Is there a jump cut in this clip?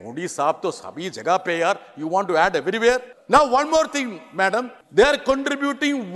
yes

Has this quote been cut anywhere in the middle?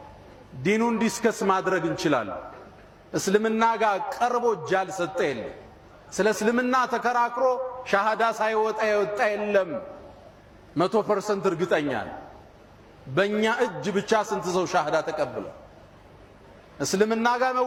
no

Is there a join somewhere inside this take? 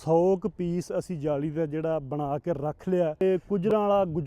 yes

